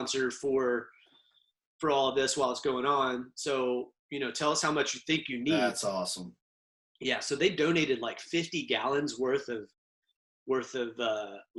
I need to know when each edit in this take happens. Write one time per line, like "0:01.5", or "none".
none